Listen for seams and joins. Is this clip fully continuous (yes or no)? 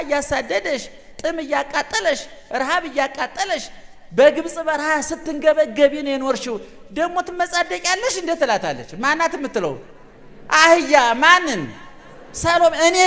yes